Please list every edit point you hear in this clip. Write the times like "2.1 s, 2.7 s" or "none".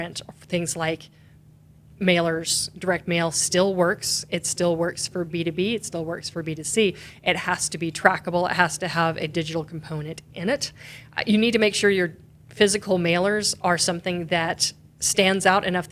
none